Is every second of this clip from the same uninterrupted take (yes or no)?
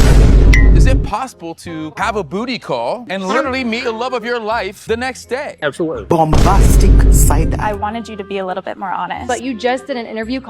no